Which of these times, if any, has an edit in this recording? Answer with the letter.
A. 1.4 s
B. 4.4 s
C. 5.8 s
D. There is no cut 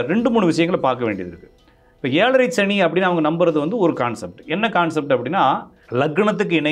C